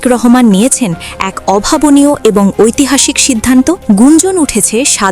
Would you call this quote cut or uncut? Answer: cut